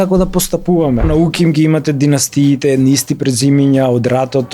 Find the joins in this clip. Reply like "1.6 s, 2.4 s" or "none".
1.1 s